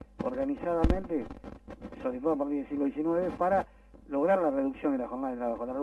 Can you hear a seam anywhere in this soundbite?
no; 0 cuts

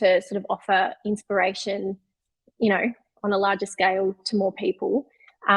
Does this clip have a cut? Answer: no; 0 cuts

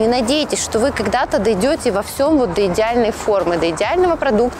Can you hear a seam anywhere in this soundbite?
no; 0 cuts

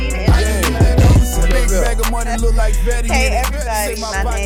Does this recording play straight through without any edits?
yes; 0 cuts

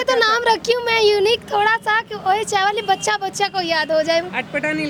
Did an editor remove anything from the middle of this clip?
no; 0 cuts

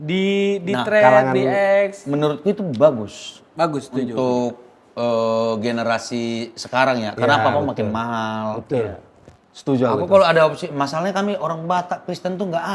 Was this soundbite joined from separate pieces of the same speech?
no; 0 cuts

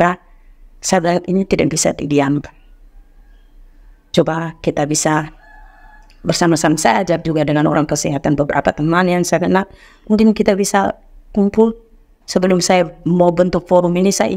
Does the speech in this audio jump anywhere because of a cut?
no; 0 cuts

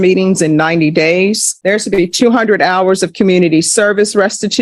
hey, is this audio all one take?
yes; 0 cuts

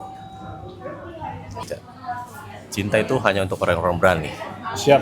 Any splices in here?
yes; 1 cut; at 1.6 s

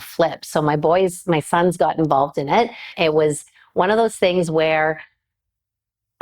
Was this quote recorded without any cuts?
no; 1 cut; at 2.9 s

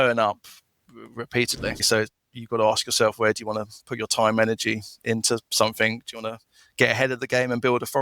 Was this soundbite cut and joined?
yes; 1 cut; at 1.9 s

